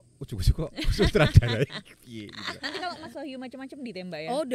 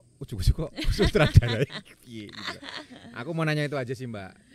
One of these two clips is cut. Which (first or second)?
first